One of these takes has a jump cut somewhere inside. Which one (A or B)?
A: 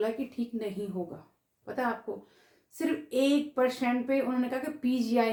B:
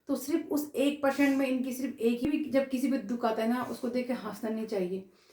B